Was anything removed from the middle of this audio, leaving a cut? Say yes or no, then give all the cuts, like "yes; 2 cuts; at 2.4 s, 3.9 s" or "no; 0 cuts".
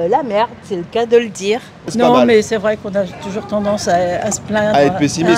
yes; 1 cut; at 1.9 s